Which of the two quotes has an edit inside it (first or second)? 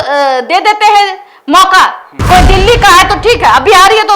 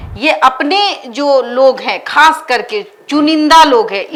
first